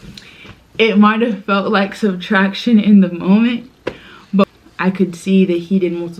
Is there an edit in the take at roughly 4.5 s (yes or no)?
yes